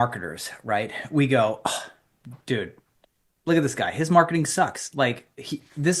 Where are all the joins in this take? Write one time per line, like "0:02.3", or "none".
none